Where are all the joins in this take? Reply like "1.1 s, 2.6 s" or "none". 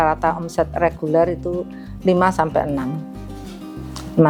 none